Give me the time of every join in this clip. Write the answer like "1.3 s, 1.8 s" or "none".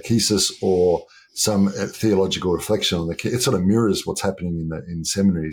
none